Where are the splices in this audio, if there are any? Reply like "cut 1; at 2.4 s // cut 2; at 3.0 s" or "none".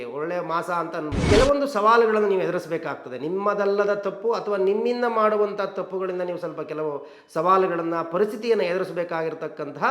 cut 1; at 1.2 s